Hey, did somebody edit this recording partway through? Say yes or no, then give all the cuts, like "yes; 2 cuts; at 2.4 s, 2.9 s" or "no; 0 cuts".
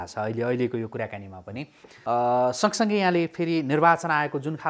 yes; 1 cut; at 1.9 s